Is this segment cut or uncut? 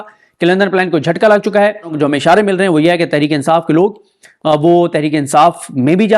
cut